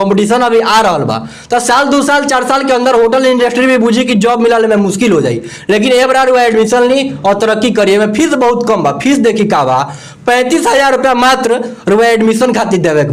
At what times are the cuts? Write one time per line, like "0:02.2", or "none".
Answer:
none